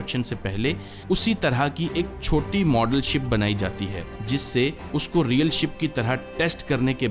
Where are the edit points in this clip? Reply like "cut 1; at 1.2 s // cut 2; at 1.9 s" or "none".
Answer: none